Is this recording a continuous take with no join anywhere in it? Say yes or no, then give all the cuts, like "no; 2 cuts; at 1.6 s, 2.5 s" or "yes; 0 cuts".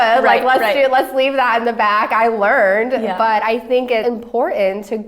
no; 1 cut; at 4.0 s